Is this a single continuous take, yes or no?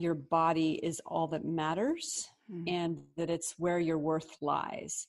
yes